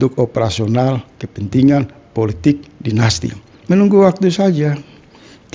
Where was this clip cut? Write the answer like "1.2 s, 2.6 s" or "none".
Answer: 3.6 s